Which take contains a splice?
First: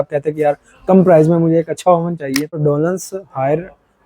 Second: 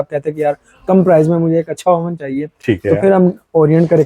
first; 1 cut; at 2.6 s

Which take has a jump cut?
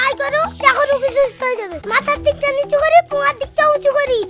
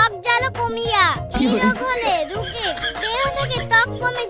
first; 1 cut; at 1.6 s

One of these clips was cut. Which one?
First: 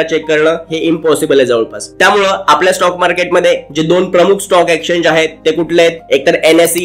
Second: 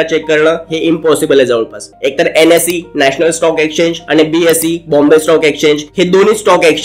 second; 1 cut; at 1.9 s

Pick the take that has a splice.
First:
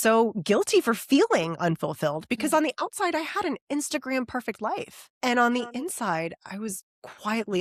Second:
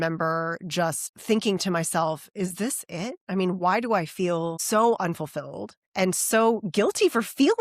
second; 1 cut; at 1.1 s

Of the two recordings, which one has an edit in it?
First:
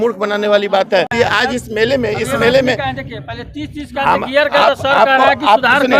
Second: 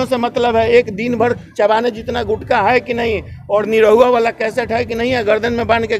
first; 1 cut; at 1.2 s

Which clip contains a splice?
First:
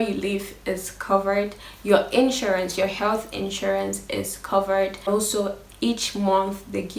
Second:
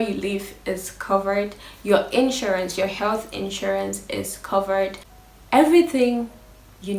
first; 1 cut; at 5.1 s

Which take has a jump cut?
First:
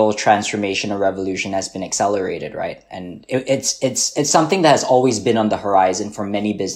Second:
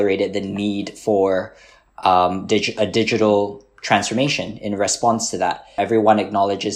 second; 1 cut; at 5.8 s

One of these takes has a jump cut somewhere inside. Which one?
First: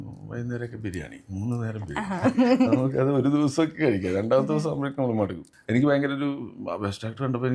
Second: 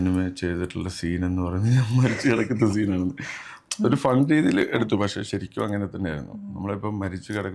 first; 1 cut; at 5.5 s

